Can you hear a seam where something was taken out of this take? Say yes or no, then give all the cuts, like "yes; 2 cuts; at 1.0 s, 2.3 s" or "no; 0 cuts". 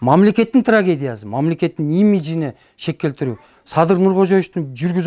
no; 0 cuts